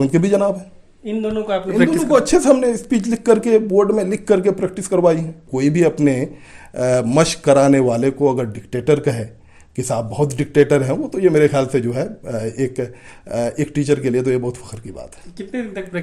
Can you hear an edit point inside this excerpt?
yes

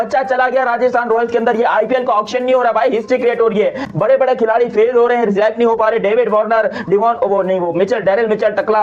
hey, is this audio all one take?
yes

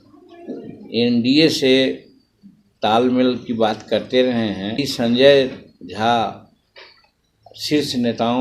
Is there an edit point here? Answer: yes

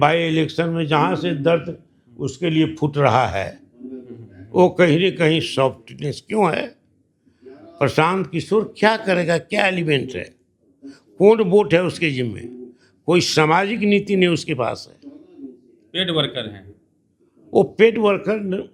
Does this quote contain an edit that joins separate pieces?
no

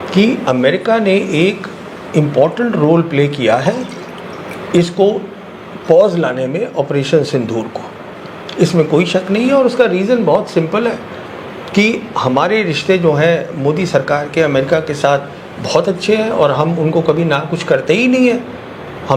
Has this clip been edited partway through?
no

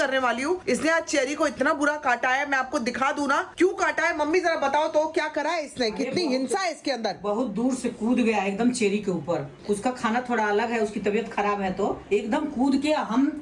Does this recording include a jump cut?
no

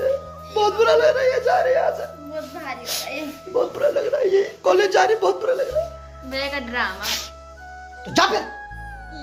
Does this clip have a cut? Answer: no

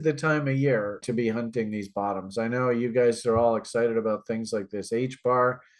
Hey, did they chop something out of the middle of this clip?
yes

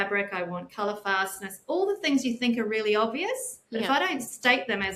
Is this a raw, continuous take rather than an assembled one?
no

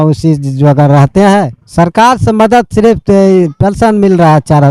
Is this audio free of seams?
no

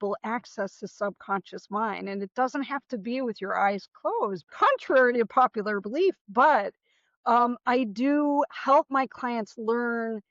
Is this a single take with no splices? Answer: no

